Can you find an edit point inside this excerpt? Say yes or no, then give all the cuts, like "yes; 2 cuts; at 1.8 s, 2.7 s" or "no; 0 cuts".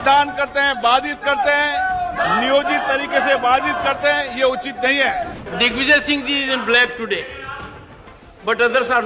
yes; 1 cut; at 5.4 s